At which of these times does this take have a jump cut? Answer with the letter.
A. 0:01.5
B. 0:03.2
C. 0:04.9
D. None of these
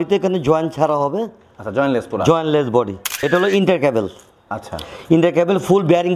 B